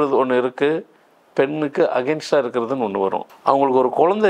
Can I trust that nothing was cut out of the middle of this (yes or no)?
no